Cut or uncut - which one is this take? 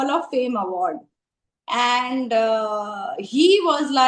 uncut